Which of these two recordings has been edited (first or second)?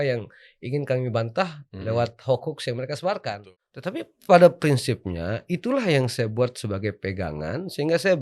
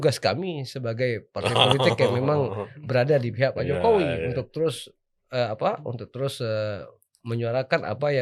first